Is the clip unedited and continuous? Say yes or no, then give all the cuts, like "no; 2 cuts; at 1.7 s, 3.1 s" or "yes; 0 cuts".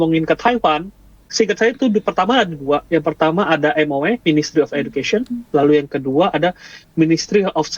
no; 1 cut; at 1.3 s